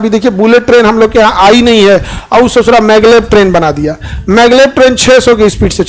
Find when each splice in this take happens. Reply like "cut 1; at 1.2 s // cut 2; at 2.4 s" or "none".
none